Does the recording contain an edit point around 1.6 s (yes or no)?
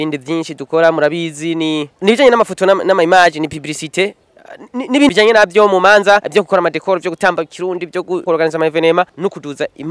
no